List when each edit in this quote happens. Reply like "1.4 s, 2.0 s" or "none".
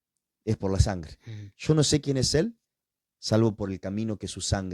none